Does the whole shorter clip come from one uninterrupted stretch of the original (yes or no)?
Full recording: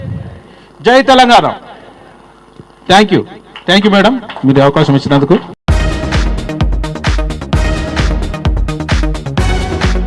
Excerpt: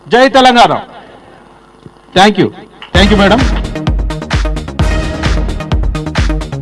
no